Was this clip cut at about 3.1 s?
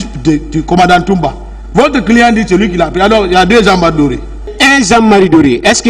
no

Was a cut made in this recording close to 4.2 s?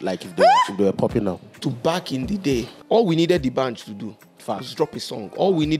no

